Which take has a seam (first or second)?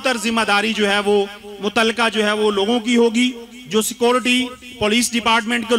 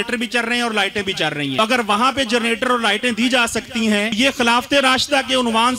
second